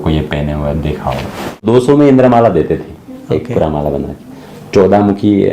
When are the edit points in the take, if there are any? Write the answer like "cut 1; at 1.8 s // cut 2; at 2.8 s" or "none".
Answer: cut 1; at 1.6 s